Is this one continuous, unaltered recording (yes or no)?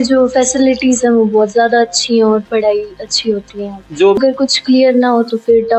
no